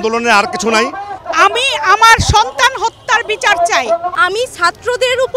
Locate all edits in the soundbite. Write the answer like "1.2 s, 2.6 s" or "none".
1.2 s, 4.2 s